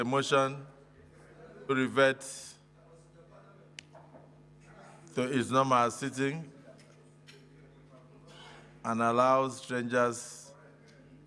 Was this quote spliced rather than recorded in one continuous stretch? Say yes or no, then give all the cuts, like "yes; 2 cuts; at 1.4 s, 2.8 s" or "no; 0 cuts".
yes; 1 cut; at 1.7 s